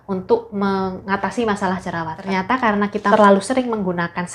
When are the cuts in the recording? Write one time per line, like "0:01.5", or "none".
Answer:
0:03.1